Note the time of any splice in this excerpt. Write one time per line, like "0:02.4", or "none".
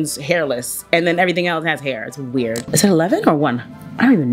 0:02.6